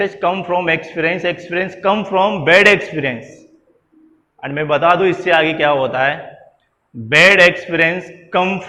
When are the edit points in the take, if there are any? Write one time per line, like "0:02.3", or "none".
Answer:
none